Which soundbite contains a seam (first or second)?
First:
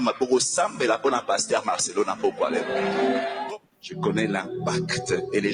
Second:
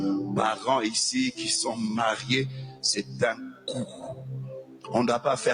first